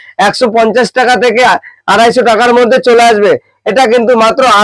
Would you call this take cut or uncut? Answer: cut